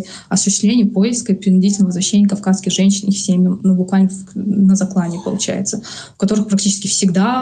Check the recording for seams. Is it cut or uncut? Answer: uncut